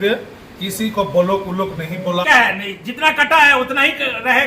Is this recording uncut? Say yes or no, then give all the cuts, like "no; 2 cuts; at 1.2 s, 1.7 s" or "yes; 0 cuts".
no; 1 cut; at 2.2 s